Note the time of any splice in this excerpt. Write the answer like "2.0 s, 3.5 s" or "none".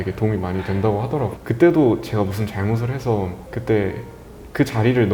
1.3 s, 3.5 s